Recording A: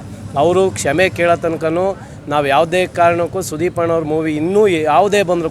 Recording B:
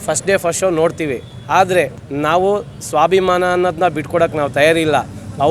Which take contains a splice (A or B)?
B